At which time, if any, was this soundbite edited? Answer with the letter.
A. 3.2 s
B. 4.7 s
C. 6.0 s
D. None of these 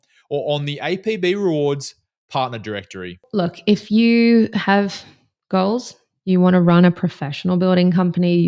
A